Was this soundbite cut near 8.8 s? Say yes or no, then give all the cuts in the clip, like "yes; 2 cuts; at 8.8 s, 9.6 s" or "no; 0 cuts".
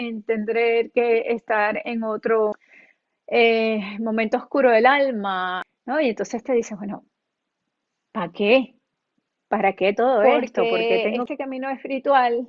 no; 3 cuts; at 2.6 s, 5.7 s, 10.7 s